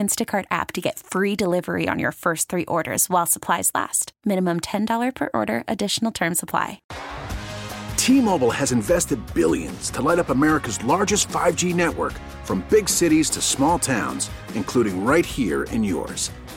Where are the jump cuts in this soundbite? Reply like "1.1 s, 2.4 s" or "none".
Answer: 6.9 s